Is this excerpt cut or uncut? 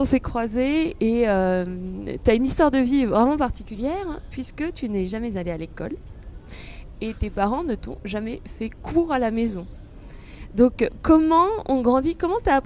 cut